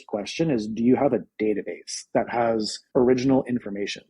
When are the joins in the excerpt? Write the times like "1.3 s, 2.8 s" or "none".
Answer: 2.8 s